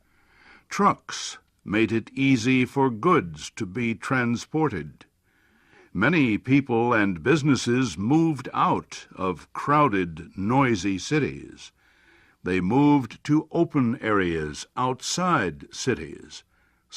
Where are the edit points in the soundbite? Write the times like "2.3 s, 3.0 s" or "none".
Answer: 12.9 s